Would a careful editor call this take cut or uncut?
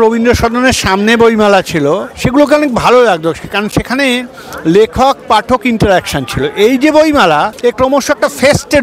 cut